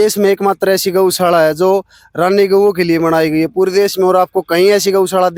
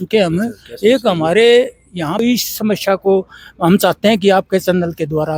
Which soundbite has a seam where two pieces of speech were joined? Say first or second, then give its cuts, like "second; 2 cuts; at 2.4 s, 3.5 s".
second; 1 cut; at 2.2 s